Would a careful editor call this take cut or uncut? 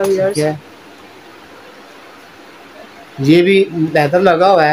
uncut